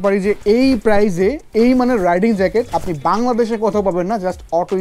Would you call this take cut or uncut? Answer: uncut